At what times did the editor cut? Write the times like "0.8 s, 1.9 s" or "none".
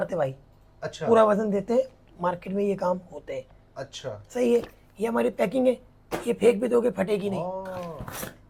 none